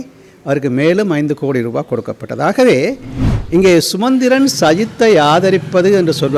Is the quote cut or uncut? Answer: uncut